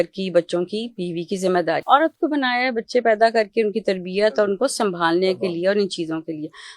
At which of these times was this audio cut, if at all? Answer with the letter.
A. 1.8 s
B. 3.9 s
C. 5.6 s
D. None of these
A